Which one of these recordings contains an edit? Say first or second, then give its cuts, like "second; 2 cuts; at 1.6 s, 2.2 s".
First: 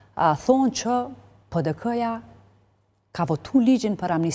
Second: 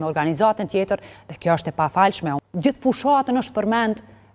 second; 1 cut; at 2.4 s